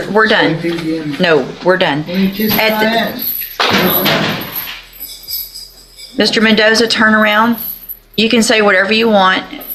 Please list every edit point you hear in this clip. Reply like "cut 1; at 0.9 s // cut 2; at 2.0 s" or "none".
none